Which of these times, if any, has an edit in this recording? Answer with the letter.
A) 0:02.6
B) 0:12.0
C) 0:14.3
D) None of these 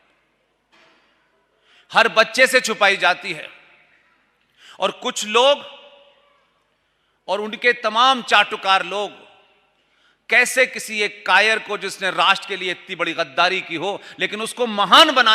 D